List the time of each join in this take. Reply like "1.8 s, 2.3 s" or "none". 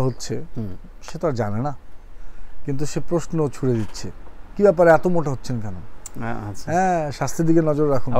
none